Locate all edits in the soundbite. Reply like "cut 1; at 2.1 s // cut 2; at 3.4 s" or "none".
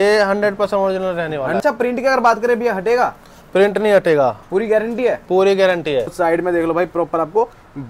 cut 1; at 1.6 s // cut 2; at 6.1 s